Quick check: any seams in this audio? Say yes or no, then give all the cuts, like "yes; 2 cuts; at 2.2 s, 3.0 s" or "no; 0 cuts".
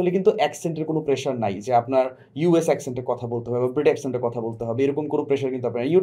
no; 0 cuts